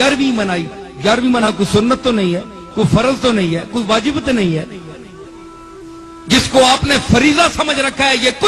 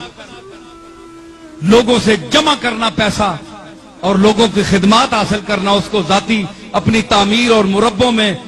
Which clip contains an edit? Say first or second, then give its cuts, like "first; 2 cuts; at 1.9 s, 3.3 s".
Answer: first; 1 cut; at 1.5 s